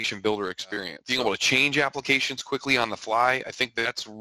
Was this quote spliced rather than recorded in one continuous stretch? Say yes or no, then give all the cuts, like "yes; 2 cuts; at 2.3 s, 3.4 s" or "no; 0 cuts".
yes; 1 cut; at 1.0 s